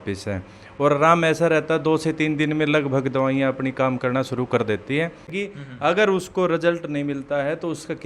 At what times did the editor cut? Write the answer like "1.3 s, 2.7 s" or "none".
5.3 s